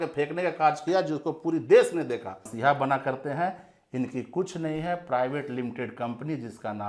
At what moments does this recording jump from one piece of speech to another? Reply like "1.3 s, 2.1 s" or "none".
2.4 s